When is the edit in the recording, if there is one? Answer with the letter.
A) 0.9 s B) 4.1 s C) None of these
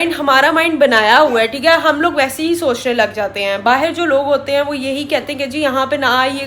C